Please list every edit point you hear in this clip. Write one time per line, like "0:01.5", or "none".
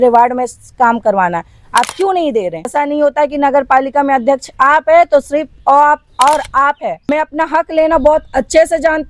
0:02.7
0:07.1